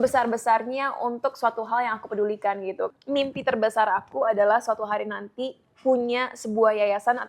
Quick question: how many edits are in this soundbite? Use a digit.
1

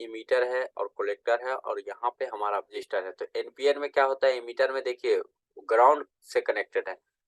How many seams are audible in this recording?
1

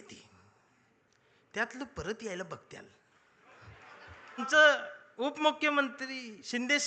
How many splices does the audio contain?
1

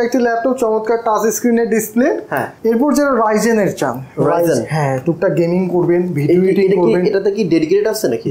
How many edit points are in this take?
1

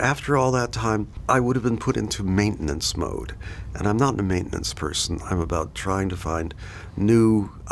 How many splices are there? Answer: 1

